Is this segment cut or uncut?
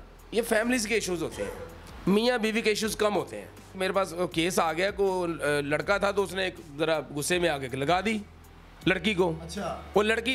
cut